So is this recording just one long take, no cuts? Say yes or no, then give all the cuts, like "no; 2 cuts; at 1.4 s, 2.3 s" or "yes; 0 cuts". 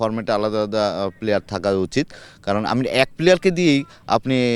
yes; 0 cuts